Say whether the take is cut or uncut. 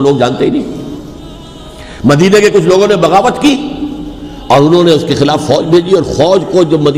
uncut